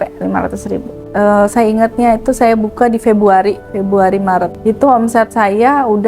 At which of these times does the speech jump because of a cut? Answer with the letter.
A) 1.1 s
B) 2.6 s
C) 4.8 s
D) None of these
A